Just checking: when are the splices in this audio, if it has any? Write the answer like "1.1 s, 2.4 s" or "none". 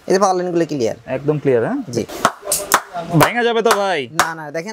2.1 s